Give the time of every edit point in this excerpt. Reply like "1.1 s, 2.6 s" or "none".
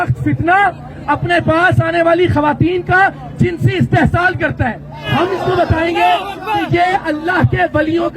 5.1 s